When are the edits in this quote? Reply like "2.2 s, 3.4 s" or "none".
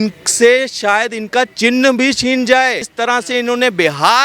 2.9 s